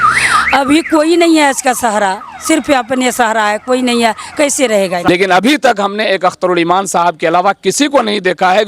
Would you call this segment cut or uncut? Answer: cut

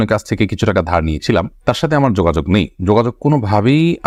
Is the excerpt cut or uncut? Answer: uncut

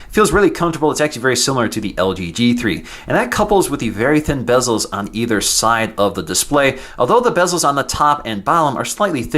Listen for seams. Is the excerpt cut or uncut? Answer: cut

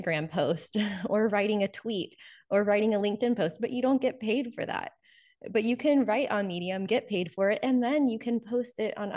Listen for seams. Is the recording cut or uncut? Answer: uncut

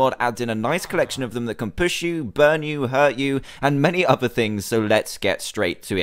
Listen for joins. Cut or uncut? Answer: uncut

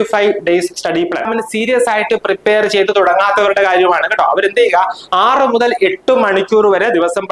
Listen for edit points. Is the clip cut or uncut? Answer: cut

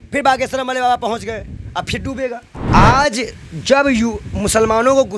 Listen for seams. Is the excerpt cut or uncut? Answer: cut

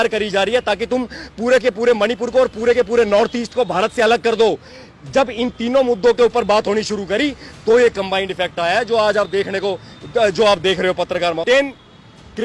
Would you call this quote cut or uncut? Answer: cut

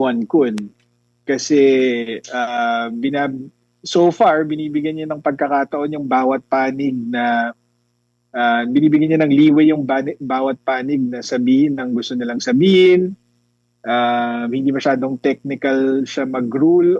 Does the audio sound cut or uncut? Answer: uncut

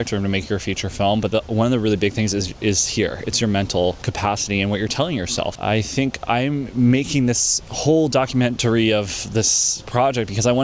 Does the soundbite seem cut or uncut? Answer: uncut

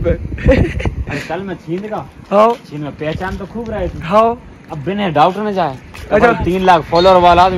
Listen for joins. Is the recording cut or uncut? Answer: uncut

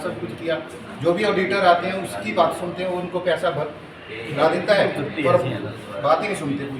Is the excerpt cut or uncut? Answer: uncut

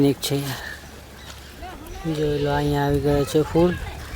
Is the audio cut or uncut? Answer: uncut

